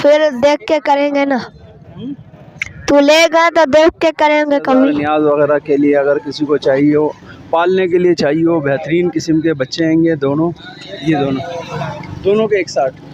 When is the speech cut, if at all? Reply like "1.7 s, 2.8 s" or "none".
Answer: 5.0 s